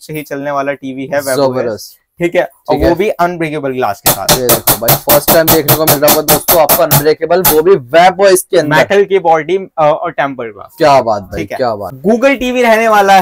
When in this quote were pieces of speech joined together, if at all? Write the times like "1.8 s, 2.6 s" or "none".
11.9 s